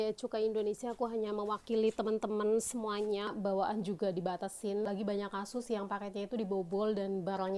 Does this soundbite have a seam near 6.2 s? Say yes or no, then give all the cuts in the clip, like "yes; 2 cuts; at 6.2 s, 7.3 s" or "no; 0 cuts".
no; 2 cuts; at 3.3 s, 4.9 s